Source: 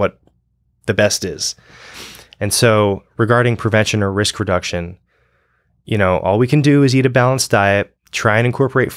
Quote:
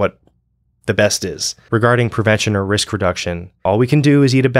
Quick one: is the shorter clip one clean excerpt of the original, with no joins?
no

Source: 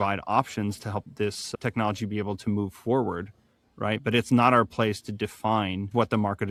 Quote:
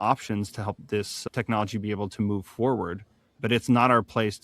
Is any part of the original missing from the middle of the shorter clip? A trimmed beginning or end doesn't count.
yes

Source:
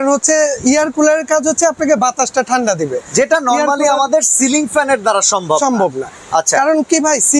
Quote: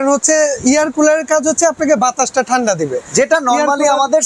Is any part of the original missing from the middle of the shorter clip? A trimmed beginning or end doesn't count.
no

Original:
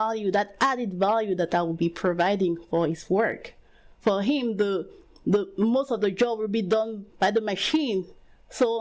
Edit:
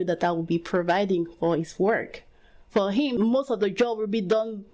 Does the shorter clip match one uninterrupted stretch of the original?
no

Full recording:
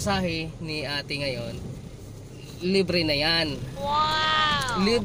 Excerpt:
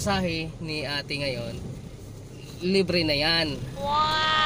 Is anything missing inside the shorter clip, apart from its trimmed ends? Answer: no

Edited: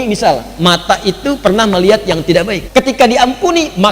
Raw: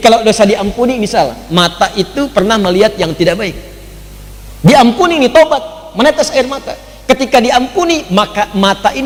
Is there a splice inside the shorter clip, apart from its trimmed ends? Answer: yes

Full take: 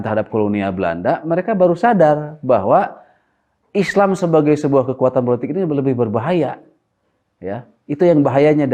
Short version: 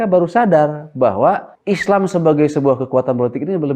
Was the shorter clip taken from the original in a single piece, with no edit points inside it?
no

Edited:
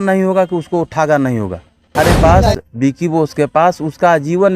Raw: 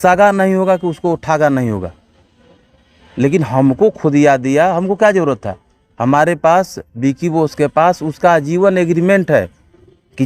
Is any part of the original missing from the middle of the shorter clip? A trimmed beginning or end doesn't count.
yes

